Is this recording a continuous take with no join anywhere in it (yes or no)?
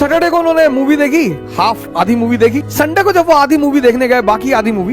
no